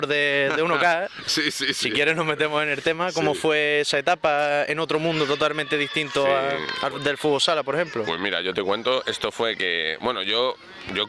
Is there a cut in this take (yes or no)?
no